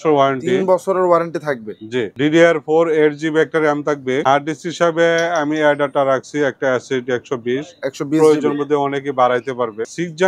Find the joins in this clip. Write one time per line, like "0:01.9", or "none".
0:02.1
0:04.2